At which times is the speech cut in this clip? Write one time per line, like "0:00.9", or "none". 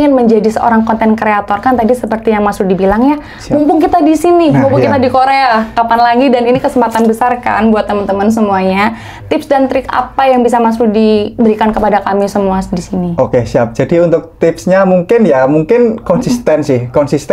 none

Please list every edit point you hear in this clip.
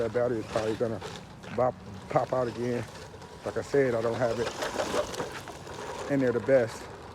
none

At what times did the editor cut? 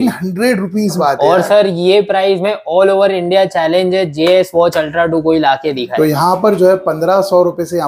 0:01.0
0:05.9

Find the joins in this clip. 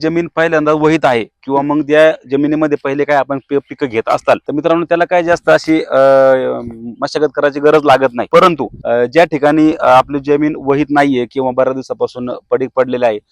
0:04.5
0:08.5

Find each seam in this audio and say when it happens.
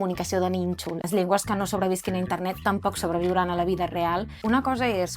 0:01.1
0:04.3

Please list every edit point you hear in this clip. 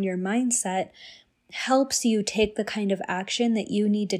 none

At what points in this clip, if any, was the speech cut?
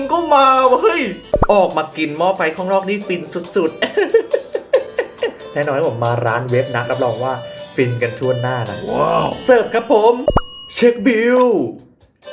0:01.2

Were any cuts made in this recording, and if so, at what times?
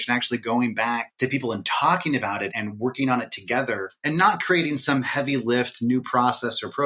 0:01.1
0:02.5
0:03.9

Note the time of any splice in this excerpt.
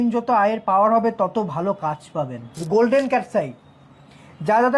0:02.6

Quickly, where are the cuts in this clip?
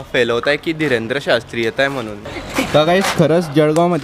0:02.2

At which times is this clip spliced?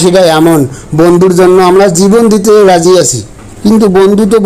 none

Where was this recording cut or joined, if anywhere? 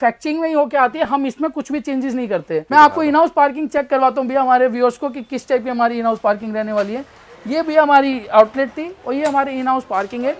0:02.7

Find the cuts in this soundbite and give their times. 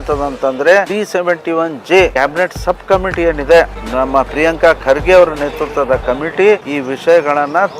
0:00.9
0:02.1
0:03.8
0:06.7

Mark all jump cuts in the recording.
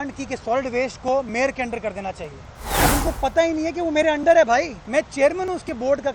0:02.8
0:04.8

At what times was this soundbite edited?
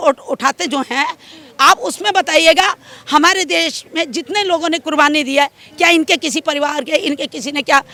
none

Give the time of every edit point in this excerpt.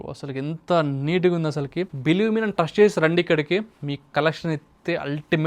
none

